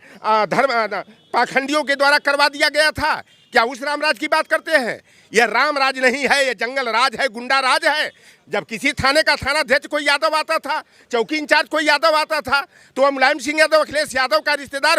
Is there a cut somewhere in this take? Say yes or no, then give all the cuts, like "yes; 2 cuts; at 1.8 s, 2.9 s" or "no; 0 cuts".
no; 0 cuts